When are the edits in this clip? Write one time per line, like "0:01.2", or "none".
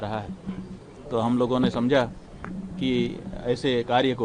none